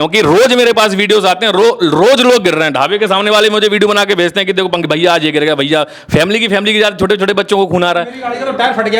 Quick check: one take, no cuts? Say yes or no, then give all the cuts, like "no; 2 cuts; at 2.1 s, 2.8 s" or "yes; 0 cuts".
yes; 0 cuts